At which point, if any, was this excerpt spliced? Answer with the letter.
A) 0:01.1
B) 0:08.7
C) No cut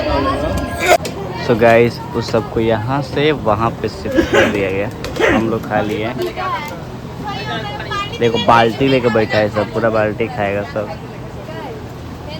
A